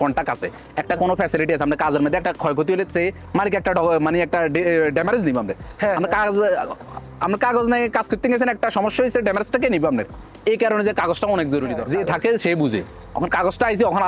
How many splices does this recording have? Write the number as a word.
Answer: one